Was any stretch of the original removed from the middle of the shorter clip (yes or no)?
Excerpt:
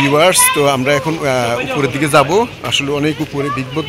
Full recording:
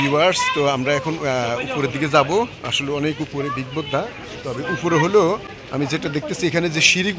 no